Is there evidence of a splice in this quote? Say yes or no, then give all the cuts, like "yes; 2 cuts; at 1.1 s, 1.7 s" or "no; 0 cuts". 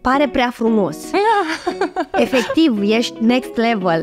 no; 0 cuts